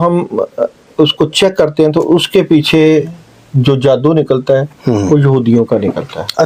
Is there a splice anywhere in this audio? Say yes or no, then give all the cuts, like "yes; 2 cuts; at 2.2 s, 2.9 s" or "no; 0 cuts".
no; 0 cuts